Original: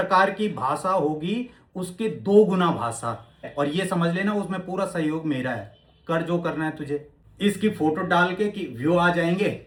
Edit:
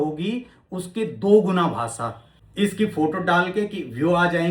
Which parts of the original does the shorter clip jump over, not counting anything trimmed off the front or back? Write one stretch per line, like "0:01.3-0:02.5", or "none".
0:03.4-0:07.2

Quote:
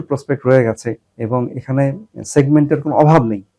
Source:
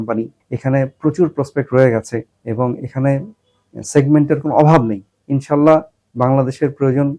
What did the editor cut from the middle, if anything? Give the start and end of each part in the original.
0:03.4-0:03.7

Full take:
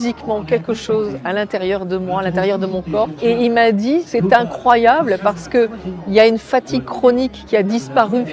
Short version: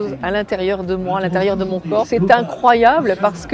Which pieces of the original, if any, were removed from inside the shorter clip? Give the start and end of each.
0:03.1-0:04.1

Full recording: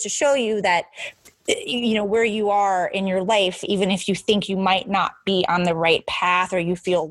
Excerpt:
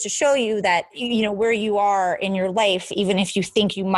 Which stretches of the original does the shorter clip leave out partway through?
0:01.0-0:01.7

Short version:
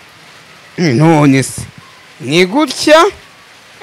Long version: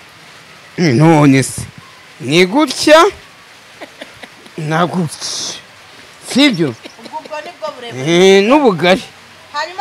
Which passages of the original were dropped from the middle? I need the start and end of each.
none

